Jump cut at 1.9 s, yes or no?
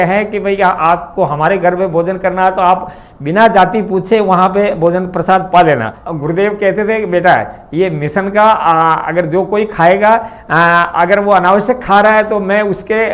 no